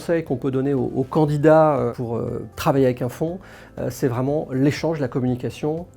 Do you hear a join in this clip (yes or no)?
no